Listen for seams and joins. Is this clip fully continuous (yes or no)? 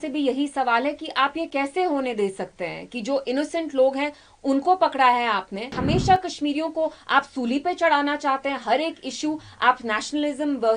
no